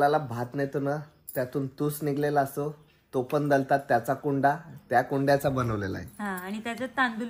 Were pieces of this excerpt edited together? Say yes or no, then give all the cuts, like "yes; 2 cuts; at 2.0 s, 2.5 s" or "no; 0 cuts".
no; 0 cuts